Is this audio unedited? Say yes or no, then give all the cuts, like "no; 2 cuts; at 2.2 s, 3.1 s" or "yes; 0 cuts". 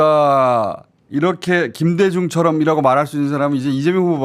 yes; 0 cuts